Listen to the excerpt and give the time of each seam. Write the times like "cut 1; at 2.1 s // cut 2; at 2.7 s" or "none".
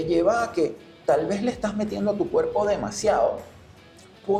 none

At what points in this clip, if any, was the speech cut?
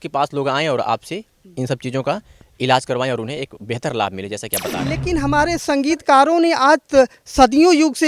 cut 1; at 4.7 s

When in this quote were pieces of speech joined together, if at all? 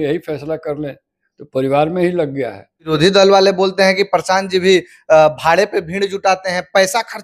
cut 1; at 2.9 s

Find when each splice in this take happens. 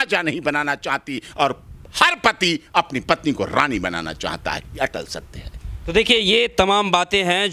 none

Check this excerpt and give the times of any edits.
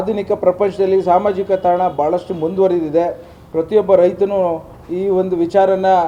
none

